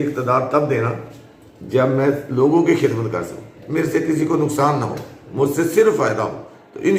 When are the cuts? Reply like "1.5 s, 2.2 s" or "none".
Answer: none